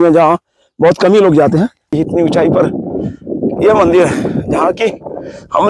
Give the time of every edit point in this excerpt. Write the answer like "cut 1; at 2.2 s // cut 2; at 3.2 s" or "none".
cut 1; at 1.9 s